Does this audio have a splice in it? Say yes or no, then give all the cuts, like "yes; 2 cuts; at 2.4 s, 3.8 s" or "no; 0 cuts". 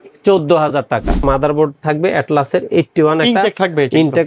yes; 1 cut; at 1.2 s